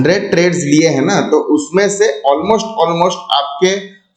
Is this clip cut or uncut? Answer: uncut